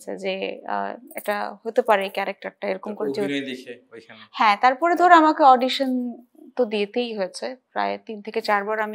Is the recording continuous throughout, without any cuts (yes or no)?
yes